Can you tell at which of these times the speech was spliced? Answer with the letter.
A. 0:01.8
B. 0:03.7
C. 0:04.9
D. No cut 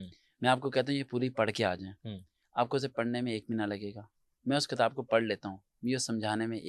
D